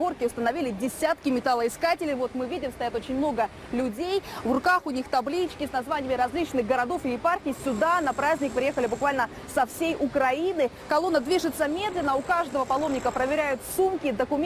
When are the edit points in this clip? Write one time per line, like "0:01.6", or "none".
0:10.8